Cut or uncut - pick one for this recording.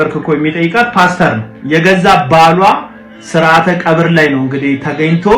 uncut